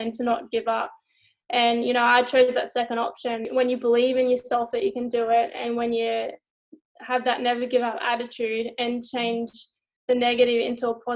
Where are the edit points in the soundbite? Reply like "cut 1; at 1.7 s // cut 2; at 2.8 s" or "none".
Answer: cut 1; at 3.5 s